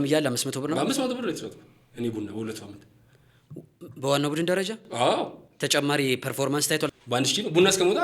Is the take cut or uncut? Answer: cut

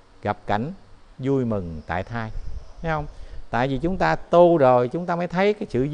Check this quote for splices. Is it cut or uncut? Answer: uncut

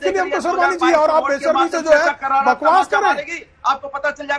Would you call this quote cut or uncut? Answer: uncut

